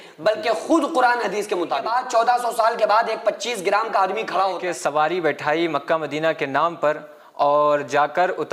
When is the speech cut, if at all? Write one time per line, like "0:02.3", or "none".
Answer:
0:01.9
0:04.6